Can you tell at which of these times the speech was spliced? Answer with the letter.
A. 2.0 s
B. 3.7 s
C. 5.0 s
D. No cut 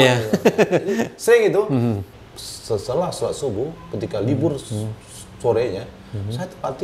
A